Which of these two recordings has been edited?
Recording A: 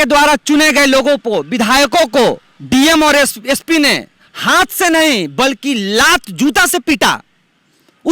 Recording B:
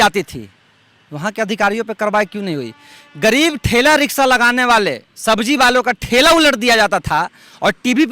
A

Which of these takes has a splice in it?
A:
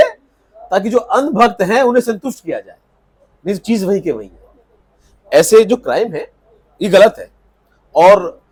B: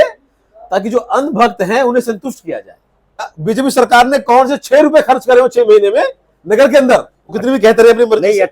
B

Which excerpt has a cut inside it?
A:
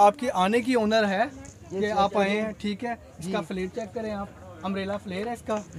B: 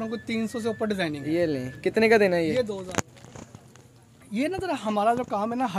B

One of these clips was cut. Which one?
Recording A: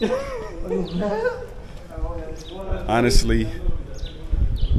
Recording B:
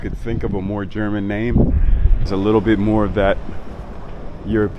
B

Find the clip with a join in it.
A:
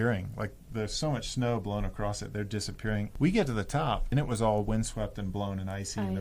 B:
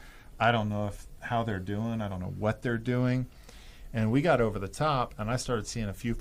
A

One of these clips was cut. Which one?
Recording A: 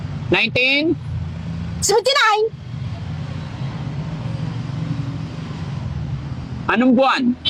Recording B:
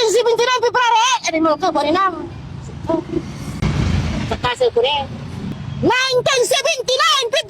B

